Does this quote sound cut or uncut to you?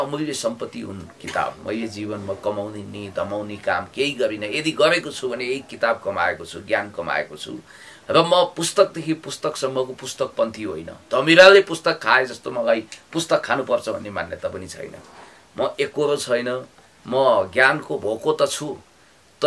uncut